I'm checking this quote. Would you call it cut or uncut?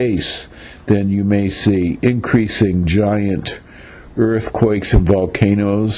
uncut